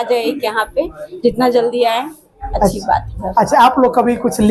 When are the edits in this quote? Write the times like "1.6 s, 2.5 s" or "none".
none